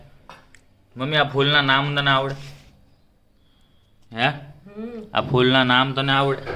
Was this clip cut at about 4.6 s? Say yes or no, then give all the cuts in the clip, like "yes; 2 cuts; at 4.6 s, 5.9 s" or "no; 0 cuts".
no; 0 cuts